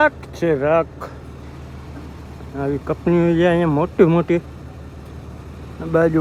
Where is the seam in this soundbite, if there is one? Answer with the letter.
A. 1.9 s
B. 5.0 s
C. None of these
C